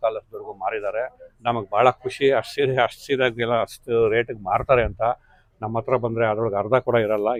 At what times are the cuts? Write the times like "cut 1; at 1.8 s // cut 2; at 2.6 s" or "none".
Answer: none